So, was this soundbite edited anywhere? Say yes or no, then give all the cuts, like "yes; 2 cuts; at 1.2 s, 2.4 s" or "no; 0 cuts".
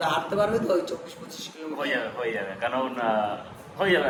no; 0 cuts